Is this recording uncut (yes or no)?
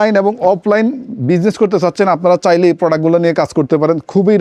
yes